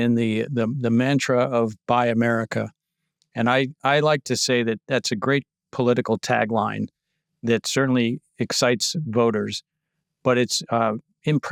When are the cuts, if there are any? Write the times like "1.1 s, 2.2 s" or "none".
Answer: none